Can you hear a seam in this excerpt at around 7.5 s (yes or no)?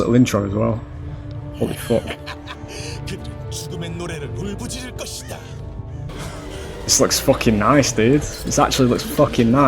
no